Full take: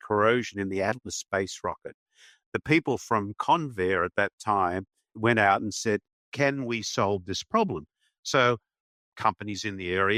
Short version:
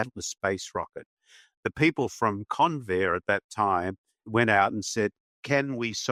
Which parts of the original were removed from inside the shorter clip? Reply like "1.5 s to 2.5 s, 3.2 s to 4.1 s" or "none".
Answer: none